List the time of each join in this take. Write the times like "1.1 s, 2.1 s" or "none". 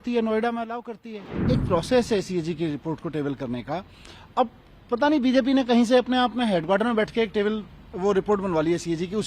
1.4 s